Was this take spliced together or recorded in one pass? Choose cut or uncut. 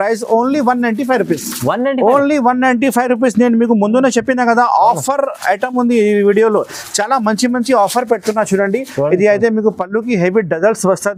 uncut